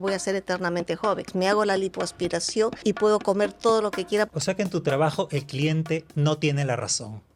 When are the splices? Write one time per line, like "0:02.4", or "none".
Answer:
0:01.3
0:02.8
0:04.3